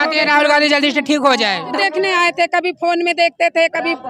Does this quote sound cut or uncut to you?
cut